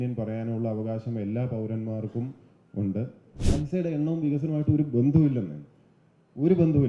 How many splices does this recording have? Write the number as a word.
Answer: one